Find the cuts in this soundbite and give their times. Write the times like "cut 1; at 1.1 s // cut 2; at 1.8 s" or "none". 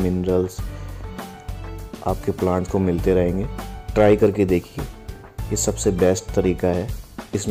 none